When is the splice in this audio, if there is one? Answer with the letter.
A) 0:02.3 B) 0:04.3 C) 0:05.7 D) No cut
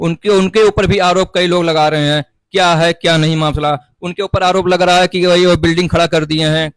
D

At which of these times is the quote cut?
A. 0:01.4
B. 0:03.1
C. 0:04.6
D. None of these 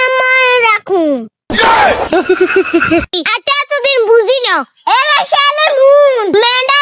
B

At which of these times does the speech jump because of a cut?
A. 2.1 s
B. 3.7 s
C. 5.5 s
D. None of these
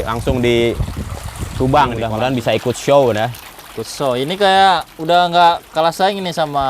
A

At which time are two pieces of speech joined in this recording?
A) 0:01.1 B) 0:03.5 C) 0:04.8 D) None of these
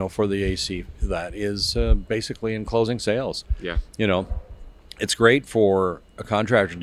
D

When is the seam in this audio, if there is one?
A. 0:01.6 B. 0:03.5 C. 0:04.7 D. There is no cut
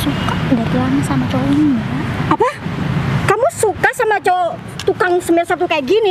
D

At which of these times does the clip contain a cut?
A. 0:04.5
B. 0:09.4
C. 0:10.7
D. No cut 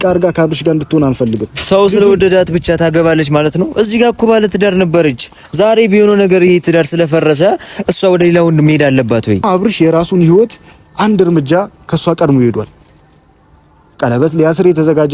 B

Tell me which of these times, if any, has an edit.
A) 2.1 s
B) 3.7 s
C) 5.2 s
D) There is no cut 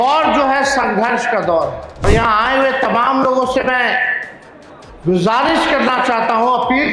A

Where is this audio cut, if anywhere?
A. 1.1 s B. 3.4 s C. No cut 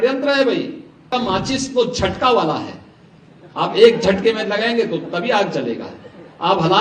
A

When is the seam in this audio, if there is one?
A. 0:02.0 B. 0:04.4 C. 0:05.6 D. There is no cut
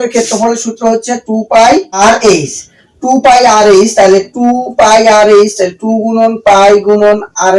A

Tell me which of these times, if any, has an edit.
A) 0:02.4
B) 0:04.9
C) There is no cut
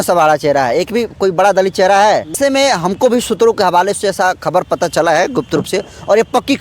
A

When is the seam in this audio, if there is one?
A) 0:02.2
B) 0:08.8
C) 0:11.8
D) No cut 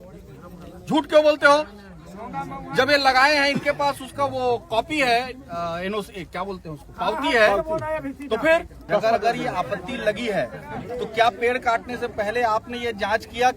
B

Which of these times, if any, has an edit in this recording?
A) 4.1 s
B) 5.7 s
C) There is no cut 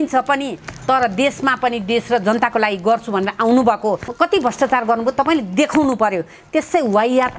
A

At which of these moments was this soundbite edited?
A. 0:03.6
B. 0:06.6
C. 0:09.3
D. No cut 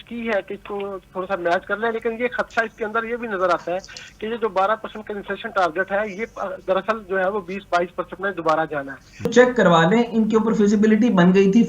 C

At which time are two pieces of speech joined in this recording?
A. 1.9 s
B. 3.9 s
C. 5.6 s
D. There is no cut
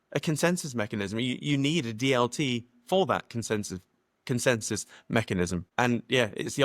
C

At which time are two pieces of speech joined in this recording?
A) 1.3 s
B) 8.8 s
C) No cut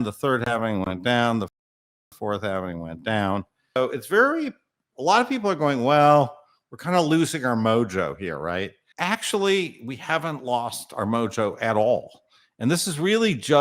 B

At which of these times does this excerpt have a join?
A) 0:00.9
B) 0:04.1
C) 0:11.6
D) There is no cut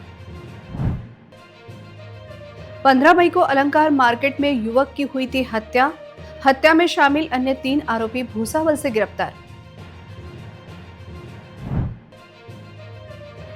A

